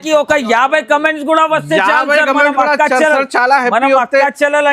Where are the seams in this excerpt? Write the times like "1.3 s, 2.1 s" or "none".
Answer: none